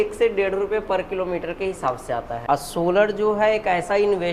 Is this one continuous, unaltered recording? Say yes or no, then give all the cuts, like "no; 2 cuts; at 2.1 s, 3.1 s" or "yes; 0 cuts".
no; 1 cut; at 2.3 s